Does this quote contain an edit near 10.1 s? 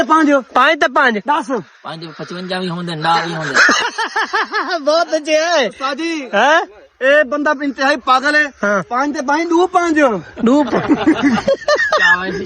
no; 0 cuts

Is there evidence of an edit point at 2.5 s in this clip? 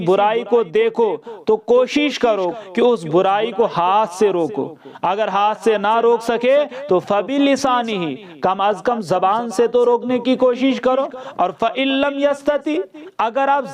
yes; 1 cut; at 2.5 s

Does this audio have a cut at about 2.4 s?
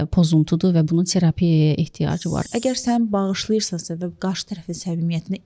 yes; 1 cut; at 2.4 s

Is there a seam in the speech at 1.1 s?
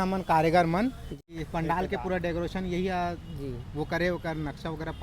yes; 1 cut; at 1.1 s

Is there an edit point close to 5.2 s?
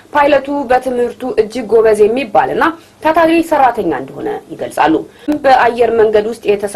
yes; 1 cut; at 5.2 s

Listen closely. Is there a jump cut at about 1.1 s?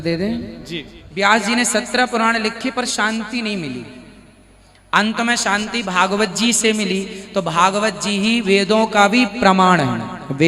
yes; 1 cut; at 1.1 s

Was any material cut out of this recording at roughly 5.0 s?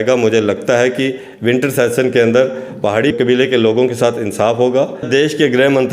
yes; 1 cut; at 5.0 s

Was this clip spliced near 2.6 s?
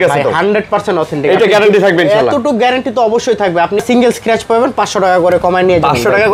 no; 1 cut; at 3.8 s

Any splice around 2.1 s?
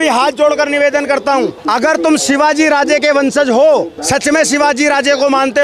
no; 1 cut; at 4.0 s

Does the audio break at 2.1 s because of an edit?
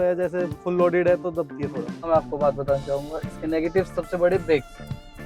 yes; 1 cut; at 2.1 s

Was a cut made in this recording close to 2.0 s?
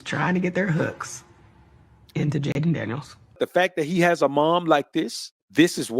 no; 1 cut; at 3.4 s

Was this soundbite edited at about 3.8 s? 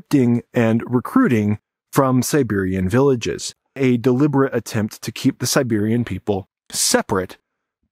yes; 1 cut; at 3.8 s

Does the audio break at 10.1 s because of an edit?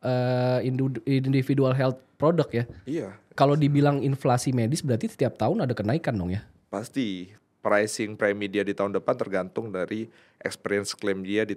no; 2 cuts; at 3.2 s, 7.3 s

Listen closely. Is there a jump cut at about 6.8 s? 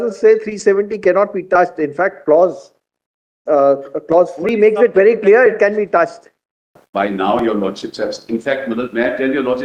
yes; 1 cut; at 6.8 s

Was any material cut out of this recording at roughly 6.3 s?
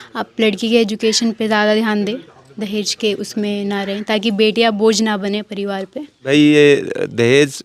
yes; 1 cut; at 6.3 s

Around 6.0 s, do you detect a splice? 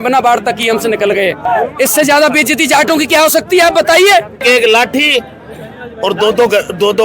no; 2 cuts; at 1.4 s, 4.4 s

